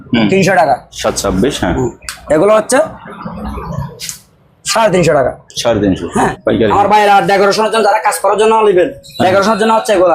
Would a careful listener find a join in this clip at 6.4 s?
yes; 2 cuts; at 0.9 s, 6.4 s

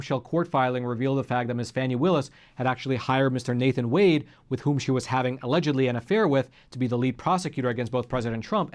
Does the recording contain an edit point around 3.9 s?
no; 0 cuts

